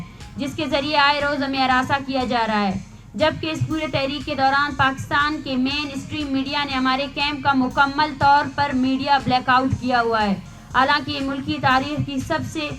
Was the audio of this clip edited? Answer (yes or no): no